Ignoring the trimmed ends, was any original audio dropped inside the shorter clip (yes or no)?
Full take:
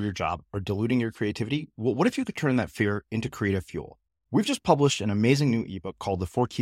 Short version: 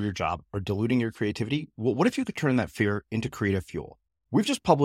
no